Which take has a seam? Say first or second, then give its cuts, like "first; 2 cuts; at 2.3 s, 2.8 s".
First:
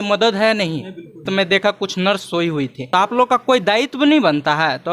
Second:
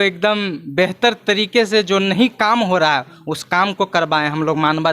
first; 2 cuts; at 1.3 s, 2.8 s